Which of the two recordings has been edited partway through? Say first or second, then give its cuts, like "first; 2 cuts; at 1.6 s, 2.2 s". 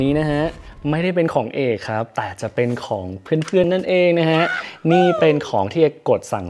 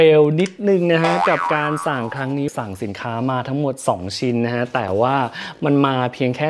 second; 1 cut; at 2.5 s